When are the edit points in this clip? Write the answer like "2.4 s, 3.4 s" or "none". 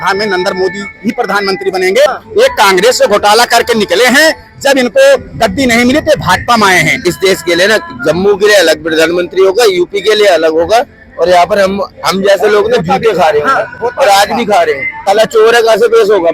2.1 s, 7.0 s, 15.0 s